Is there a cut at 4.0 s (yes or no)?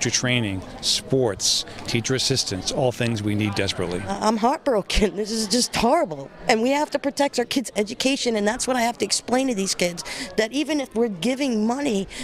yes